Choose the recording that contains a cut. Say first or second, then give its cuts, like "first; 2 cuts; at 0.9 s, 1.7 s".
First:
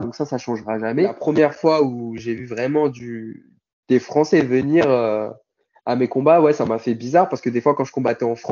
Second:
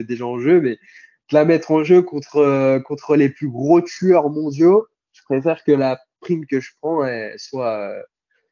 first; 1 cut; at 1.2 s